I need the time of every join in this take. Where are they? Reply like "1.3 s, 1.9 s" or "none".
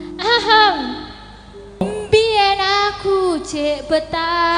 1.8 s